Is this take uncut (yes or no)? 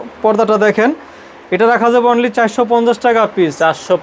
yes